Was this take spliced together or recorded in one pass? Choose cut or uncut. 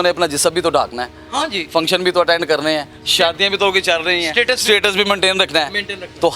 uncut